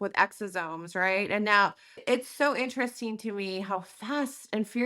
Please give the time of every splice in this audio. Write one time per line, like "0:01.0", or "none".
0:02.0

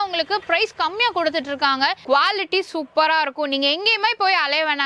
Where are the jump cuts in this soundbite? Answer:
0:02.0

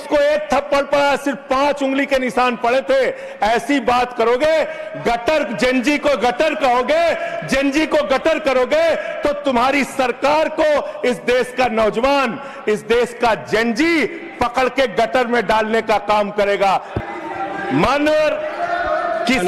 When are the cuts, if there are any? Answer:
0:16.9

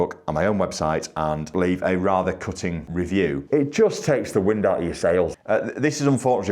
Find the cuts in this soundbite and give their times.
0:01.5
0:03.1
0:05.3

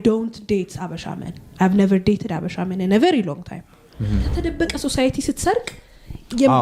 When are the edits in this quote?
0:04.3

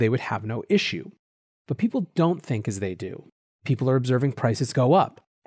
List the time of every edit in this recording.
none

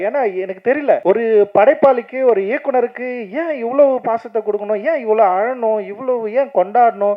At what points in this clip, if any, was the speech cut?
0:01.0

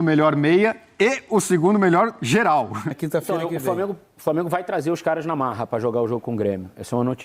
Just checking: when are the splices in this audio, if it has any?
0:02.9

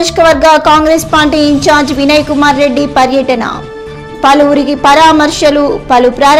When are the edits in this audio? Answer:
none

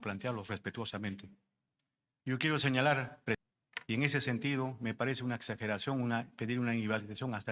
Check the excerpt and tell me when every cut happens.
0:03.4

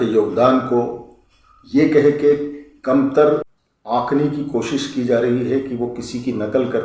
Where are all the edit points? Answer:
0:04.1

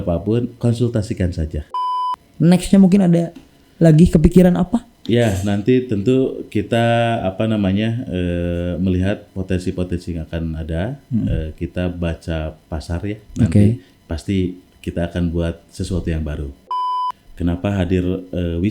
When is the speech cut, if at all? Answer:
0:01.7
0:16.7

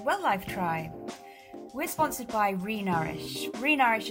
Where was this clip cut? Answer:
none

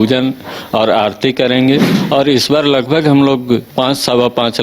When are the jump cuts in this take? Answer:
0:01.9
0:03.7

